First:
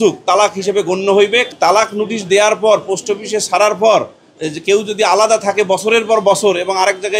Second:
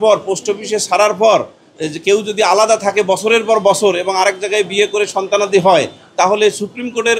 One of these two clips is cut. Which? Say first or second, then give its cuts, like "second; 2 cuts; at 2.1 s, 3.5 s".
first; 1 cut; at 1.5 s